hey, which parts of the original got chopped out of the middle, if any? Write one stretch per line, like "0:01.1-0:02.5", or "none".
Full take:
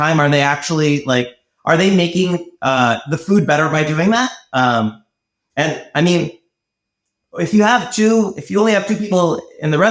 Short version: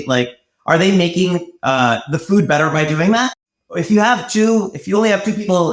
0:04.4-0:07.0

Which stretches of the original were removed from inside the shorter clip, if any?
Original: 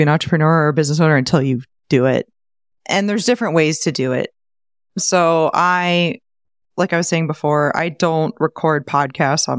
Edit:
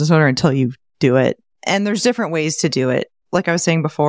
0:02.4-0:02.7
0:04.4-0:06.6

